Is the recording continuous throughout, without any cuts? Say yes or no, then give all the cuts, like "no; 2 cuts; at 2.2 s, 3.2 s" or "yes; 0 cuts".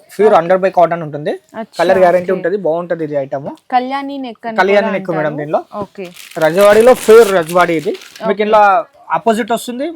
yes; 0 cuts